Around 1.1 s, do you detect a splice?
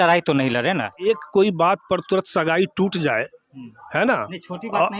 yes; 1 cut; at 1.1 s

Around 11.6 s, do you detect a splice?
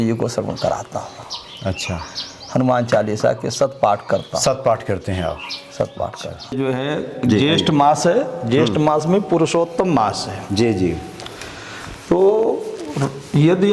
no; 1 cut; at 6.5 s

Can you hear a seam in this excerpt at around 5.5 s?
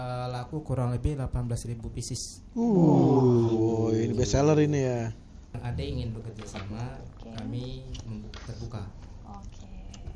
yes; 1 cut; at 5.5 s

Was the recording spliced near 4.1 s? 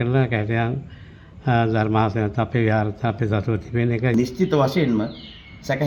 yes; 1 cut; at 4.1 s

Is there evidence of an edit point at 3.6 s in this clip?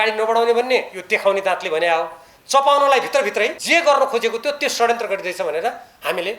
yes; 1 cut; at 3.6 s

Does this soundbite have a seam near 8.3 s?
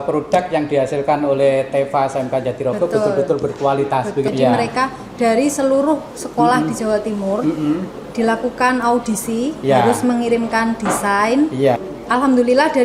no; 2 cuts; at 4.3 s, 11.8 s

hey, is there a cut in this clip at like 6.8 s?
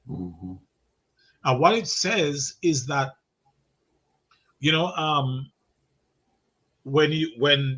no; 0 cuts

